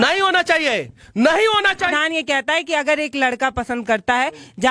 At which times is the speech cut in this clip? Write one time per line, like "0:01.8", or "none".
0:02.0